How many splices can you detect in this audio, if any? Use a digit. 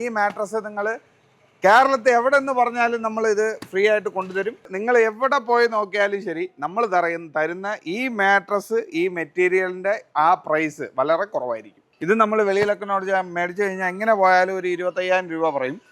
2